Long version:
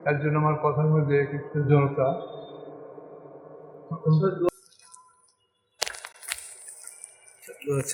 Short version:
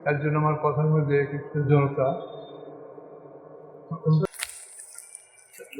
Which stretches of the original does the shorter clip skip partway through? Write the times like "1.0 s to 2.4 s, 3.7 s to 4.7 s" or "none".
4.3 s to 6.1 s